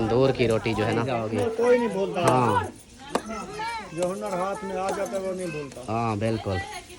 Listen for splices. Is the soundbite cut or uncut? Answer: cut